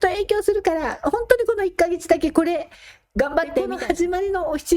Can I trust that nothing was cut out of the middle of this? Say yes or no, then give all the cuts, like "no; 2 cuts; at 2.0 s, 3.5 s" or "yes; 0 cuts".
no; 1 cut; at 3.7 s